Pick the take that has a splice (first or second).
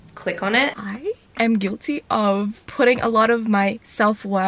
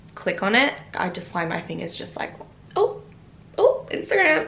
first